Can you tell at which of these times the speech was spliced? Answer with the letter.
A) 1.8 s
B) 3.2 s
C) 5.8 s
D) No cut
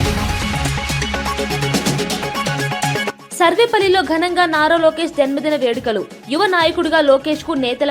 B